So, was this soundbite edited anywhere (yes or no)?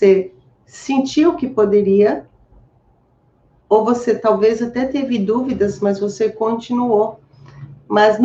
no